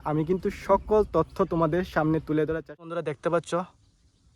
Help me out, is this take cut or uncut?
cut